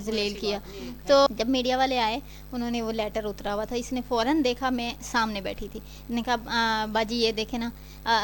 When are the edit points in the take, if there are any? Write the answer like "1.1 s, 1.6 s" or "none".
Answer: 1.3 s